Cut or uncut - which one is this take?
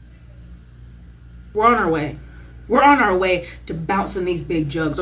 cut